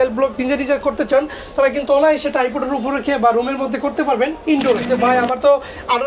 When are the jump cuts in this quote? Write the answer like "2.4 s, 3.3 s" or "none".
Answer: 4.9 s